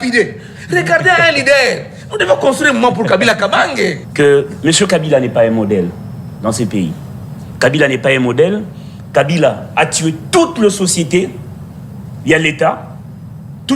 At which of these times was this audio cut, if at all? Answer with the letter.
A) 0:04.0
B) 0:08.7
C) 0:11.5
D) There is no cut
A